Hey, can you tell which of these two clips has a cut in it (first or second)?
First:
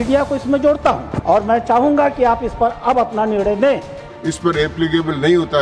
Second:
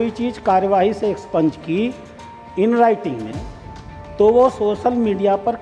first